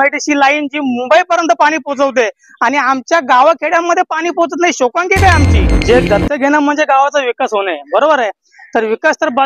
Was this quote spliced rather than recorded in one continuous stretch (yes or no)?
yes